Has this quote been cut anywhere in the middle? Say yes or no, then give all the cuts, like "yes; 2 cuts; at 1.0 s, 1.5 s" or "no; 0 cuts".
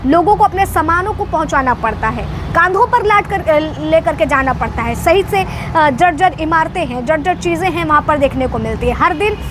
no; 0 cuts